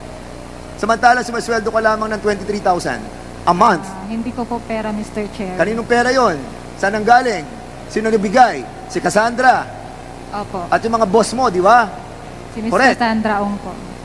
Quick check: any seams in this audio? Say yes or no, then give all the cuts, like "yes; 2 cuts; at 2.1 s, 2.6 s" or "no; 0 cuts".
no; 0 cuts